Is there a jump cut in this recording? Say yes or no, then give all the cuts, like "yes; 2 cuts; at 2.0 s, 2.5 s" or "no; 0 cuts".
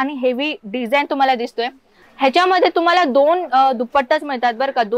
yes; 1 cut; at 2.0 s